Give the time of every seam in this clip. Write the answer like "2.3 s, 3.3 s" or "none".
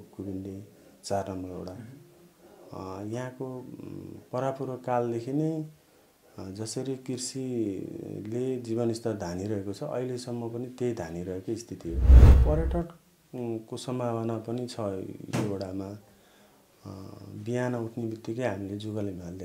12.3 s